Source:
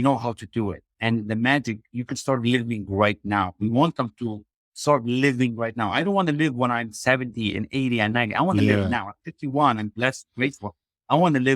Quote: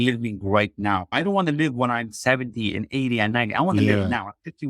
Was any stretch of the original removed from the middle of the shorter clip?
yes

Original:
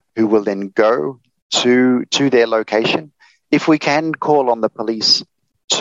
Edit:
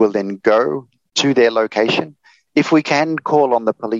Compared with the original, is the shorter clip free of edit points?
no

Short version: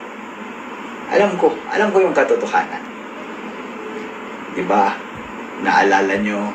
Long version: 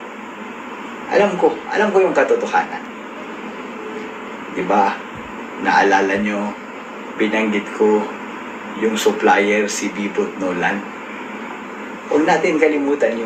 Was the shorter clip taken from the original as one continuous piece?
yes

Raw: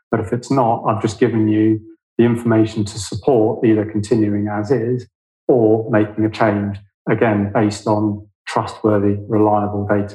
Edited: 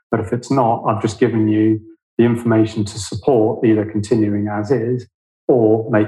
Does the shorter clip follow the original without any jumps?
yes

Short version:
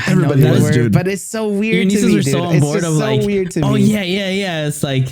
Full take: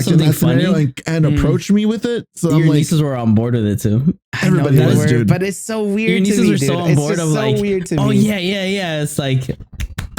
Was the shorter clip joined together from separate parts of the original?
no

